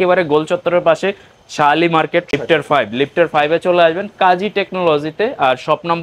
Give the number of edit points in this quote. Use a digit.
1